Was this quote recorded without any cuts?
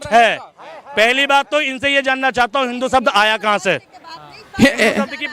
yes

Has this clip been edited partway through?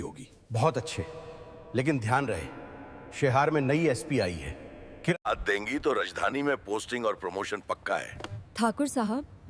yes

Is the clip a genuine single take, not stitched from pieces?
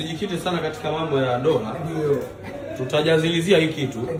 yes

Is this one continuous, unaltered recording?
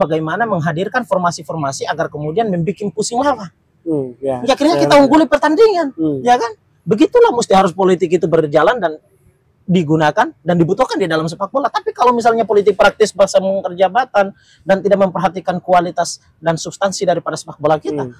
yes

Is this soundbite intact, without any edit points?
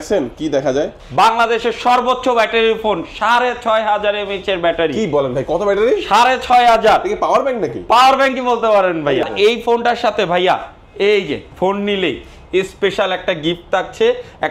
no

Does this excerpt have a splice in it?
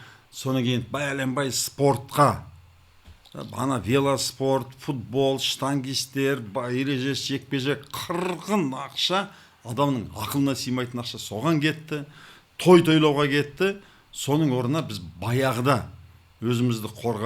no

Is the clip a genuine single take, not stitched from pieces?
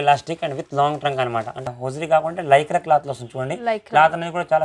no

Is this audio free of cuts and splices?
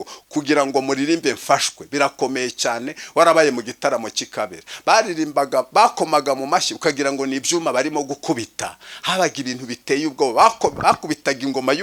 yes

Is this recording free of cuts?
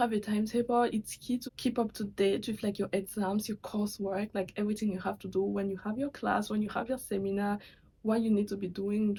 yes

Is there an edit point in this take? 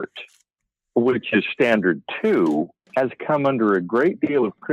yes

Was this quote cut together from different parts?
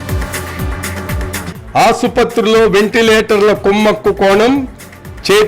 yes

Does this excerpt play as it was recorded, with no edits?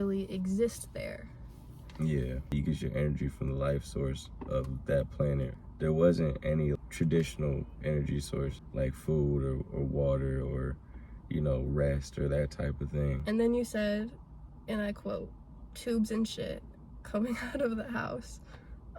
no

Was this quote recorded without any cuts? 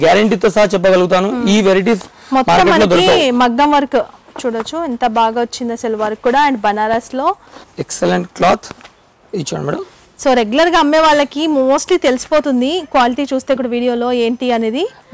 yes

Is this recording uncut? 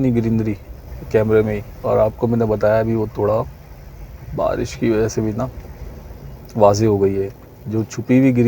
no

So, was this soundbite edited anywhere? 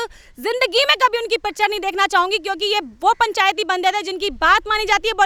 no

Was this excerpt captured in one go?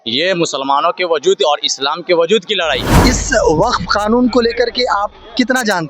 no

